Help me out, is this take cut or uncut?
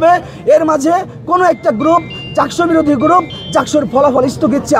uncut